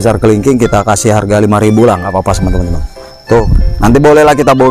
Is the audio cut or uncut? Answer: cut